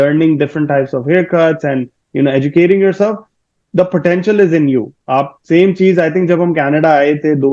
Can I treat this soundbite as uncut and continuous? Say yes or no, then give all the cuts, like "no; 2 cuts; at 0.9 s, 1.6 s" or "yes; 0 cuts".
yes; 0 cuts